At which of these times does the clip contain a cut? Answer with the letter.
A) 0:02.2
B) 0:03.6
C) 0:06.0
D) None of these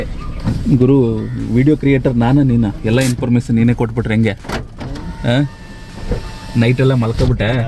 D